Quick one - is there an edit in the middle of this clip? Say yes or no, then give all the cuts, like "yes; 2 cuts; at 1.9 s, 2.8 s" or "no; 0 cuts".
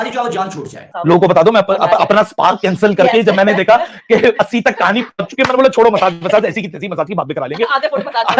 yes; 1 cut; at 0.9 s